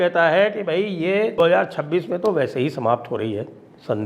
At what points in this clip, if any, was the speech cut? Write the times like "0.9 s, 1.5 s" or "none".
1.5 s